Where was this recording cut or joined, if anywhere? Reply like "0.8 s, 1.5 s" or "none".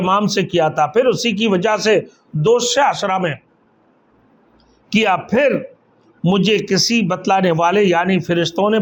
none